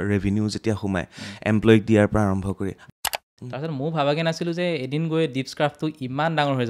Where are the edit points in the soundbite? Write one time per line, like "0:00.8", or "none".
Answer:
0:02.9